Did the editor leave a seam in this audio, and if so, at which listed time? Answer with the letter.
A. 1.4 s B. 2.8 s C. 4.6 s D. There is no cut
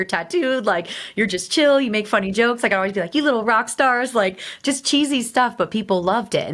D